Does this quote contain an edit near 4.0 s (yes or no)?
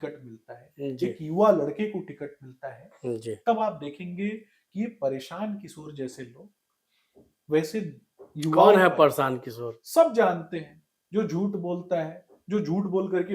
no